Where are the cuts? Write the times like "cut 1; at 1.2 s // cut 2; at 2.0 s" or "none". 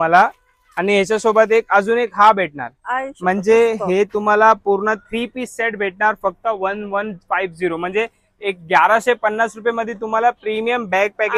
none